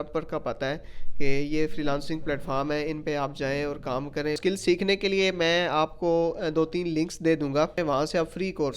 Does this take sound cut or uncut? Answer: cut